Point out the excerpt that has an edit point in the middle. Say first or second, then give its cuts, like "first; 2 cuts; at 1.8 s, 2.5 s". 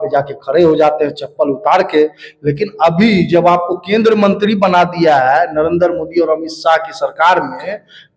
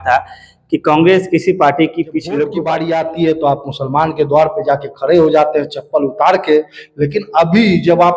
second; 1 cut; at 2.6 s